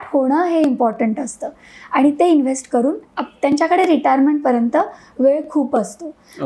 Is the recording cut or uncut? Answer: uncut